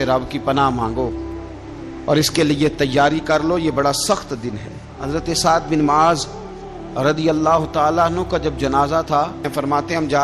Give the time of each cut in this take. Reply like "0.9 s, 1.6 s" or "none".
4.9 s, 9.5 s